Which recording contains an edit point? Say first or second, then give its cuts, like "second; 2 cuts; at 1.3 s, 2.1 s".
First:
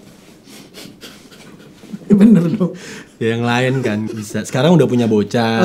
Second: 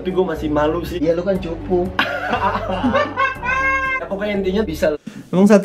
first; 1 cut; at 4.1 s